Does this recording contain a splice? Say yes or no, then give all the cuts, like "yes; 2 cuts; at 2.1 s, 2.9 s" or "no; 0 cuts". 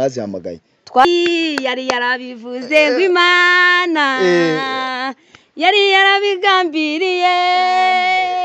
yes; 1 cut; at 1.0 s